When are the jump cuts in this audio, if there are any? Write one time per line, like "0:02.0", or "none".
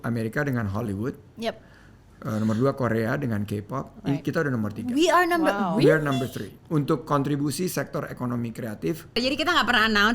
0:09.2